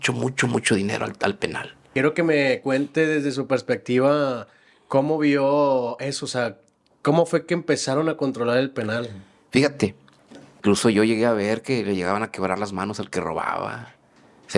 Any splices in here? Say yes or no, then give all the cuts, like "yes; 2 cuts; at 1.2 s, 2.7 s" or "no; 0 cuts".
yes; 2 cuts; at 1.8 s, 10.6 s